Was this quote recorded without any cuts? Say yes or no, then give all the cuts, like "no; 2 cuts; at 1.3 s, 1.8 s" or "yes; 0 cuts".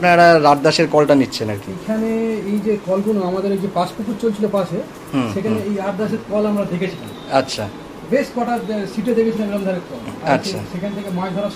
yes; 0 cuts